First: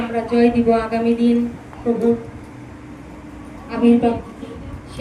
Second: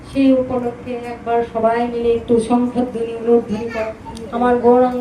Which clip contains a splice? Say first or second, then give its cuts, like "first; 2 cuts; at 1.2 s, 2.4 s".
second; 1 cut; at 4.1 s